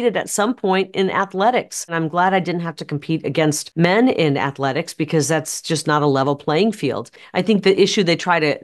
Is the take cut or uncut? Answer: cut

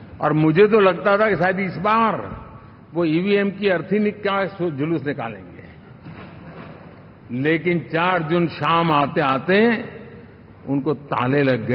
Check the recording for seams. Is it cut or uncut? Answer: uncut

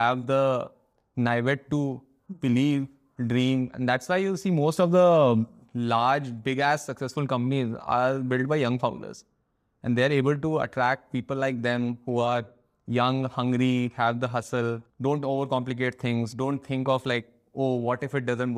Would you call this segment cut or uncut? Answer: cut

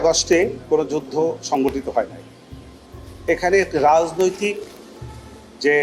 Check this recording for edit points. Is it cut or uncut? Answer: uncut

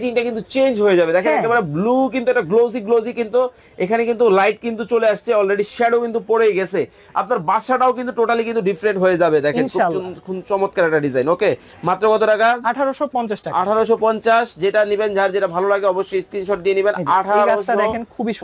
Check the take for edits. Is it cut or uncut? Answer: uncut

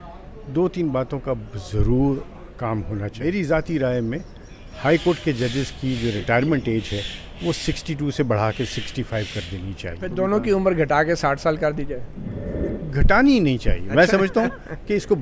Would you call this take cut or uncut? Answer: cut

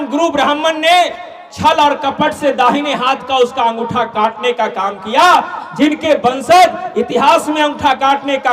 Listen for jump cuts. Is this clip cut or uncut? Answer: uncut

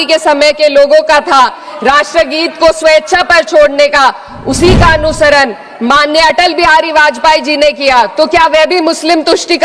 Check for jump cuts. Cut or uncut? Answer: uncut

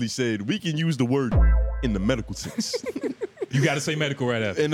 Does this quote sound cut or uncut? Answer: uncut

